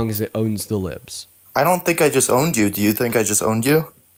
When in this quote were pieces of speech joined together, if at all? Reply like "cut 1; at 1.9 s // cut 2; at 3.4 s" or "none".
none